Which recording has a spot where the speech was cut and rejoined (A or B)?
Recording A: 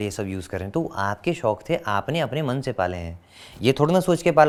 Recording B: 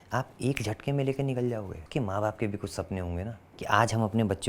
B